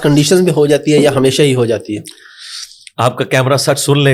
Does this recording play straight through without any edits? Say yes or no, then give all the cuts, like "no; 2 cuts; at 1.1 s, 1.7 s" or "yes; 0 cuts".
yes; 0 cuts